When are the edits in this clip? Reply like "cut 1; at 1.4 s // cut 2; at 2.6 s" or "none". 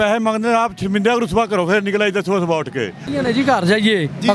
cut 1; at 3.0 s